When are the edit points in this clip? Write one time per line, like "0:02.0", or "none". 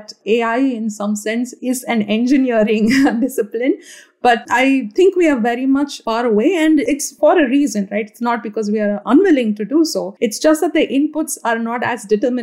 0:01.5
0:04.4
0:06.0
0:06.9
0:10.0